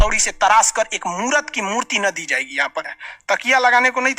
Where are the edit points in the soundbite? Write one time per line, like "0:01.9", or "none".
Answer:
0:02.9